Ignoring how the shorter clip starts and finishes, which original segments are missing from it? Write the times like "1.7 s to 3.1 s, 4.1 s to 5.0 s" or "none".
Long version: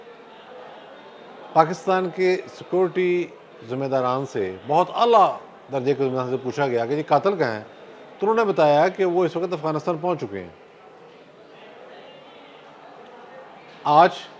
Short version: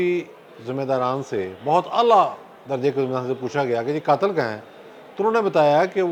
none

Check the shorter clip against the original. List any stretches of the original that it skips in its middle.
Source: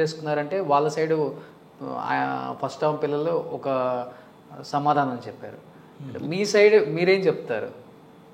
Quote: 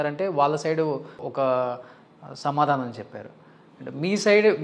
1.6 s to 3.5 s

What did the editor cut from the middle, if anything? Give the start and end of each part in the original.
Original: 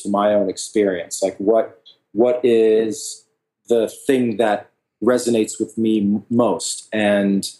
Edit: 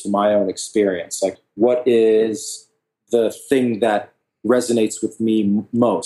1.4 s to 1.9 s

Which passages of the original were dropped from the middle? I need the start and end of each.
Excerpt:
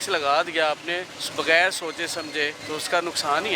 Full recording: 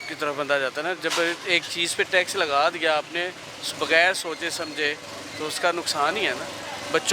3.4 s to 3.6 s, 5.0 s to 5.3 s

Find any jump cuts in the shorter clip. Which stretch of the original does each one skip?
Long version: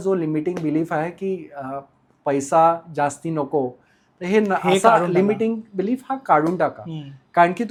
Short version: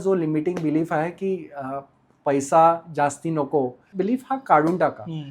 3.9 s to 5.7 s

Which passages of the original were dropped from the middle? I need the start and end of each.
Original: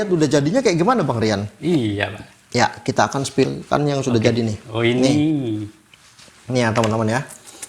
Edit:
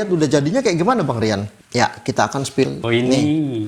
1.5 s to 2.3 s, 3.6 s to 4.7 s

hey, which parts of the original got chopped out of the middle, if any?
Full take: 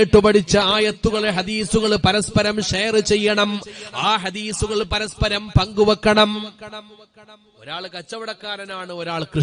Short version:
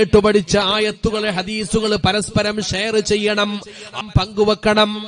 4.0 s to 5.4 s

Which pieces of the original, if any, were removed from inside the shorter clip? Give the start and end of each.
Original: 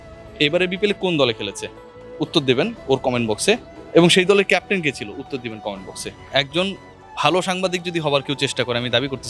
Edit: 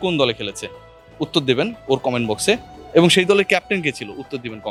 none

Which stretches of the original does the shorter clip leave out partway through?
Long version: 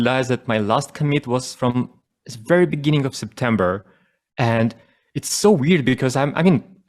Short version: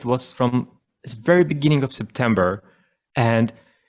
none

